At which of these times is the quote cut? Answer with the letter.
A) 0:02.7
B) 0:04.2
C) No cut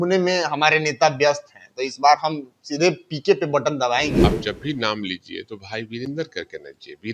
B